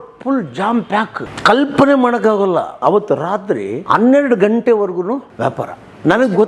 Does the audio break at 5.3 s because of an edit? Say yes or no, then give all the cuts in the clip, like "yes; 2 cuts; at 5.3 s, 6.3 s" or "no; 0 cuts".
yes; 4 cuts; at 1.2 s, 2.8 s, 3.7 s, 5.3 s